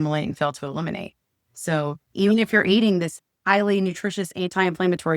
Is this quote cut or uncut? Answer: cut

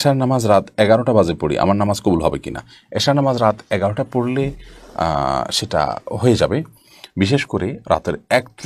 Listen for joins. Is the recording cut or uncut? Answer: uncut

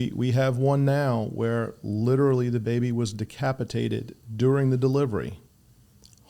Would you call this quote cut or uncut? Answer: uncut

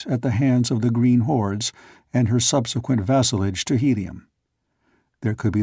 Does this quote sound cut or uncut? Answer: cut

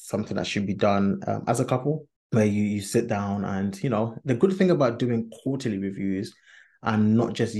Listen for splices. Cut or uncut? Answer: cut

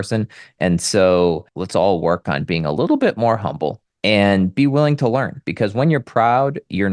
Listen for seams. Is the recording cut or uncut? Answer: cut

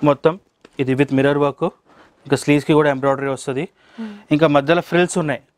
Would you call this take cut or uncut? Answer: uncut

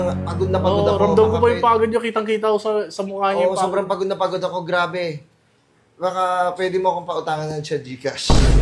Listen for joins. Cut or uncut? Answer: uncut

